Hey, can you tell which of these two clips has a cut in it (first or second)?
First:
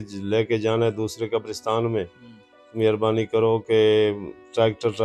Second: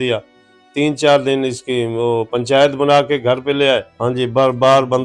second